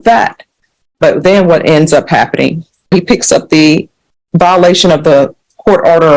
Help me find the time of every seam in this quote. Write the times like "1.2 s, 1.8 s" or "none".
2.9 s